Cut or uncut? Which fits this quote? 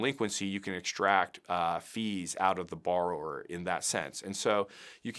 uncut